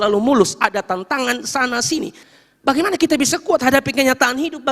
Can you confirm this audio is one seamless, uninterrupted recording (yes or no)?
no